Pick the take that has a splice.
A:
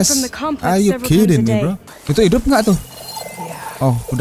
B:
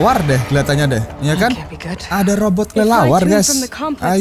A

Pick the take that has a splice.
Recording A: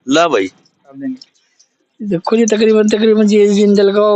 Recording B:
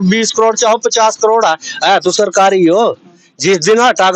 A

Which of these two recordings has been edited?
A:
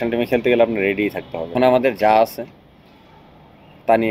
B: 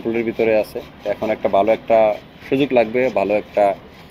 A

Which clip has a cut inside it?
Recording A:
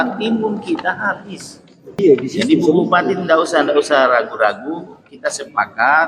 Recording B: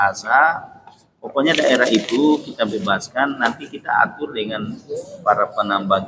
A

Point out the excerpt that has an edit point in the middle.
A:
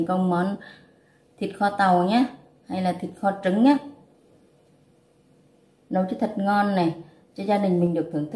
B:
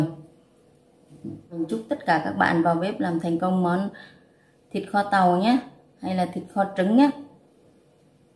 B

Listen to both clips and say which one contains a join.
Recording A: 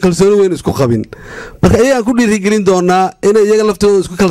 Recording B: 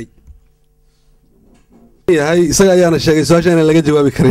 B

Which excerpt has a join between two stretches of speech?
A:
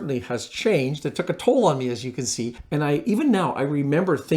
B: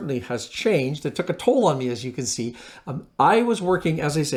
A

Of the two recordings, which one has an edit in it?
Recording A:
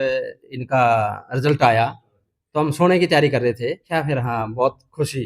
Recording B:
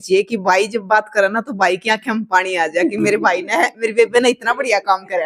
A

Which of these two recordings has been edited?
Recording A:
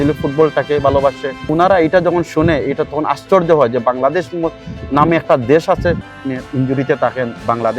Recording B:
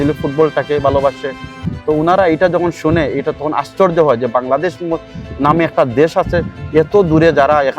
A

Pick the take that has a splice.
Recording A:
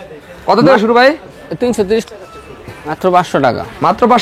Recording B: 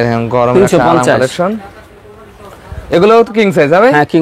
A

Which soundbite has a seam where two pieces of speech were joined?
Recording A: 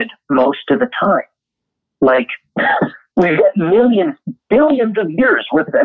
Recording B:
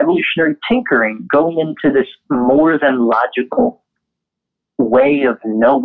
A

